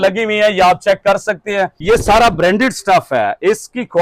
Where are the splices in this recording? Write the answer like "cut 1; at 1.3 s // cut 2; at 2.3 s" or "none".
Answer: cut 1; at 1.8 s